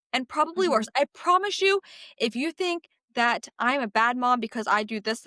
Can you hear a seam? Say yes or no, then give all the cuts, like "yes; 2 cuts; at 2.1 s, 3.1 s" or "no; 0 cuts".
no; 0 cuts